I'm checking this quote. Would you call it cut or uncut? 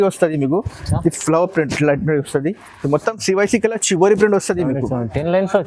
uncut